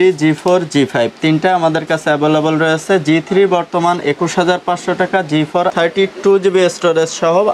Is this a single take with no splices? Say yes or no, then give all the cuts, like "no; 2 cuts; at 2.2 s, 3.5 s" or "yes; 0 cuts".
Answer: no; 1 cut; at 5.6 s